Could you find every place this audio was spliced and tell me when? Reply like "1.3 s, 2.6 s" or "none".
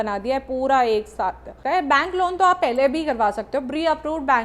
1.5 s